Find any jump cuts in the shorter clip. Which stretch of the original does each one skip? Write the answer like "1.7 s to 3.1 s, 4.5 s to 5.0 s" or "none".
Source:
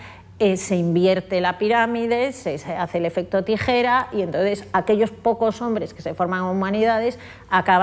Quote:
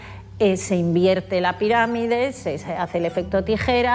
none